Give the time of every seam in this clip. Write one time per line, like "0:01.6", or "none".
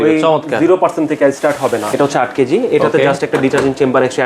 0:01.9